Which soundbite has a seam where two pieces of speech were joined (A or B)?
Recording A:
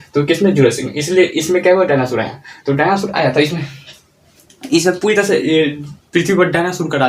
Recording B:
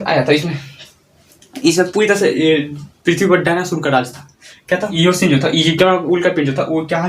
B